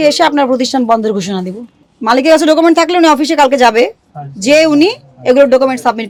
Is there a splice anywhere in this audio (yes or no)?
no